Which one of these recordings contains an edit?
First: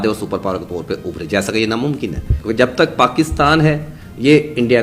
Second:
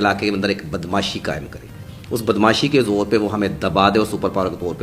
first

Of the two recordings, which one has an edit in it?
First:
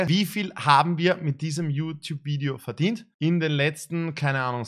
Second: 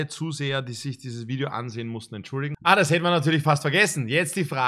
second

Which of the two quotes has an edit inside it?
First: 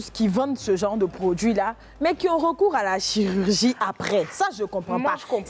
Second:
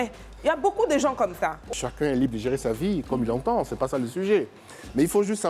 second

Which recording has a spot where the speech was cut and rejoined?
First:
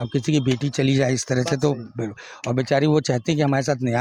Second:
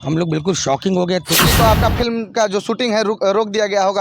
second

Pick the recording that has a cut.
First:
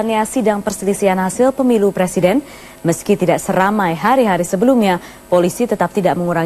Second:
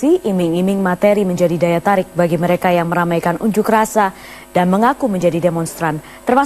second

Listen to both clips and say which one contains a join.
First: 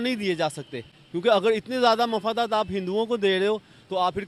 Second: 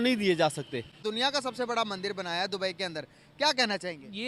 second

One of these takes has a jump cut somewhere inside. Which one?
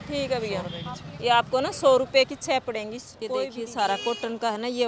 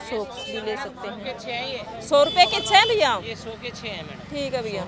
first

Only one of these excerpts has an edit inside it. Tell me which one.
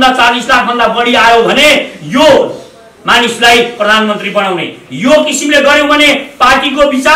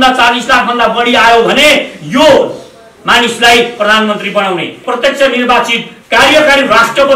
second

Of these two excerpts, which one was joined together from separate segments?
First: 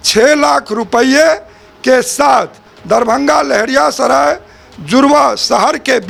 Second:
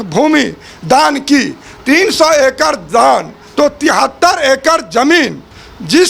second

